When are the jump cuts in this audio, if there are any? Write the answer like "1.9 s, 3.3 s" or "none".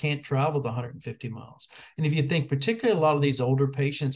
none

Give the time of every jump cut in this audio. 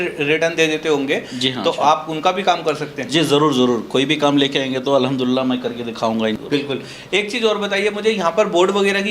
6.4 s

